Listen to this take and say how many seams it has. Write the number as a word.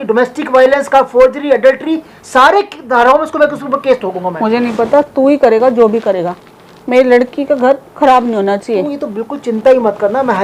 zero